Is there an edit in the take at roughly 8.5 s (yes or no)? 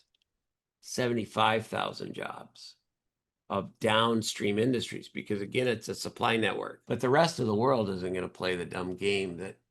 no